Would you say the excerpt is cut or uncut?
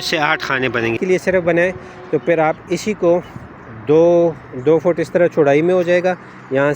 cut